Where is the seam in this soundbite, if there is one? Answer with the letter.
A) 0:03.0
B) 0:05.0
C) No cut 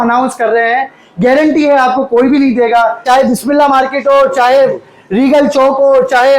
A